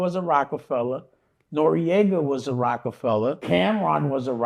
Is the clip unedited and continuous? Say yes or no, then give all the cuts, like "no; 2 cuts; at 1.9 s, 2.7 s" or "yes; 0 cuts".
no; 1 cut; at 3.4 s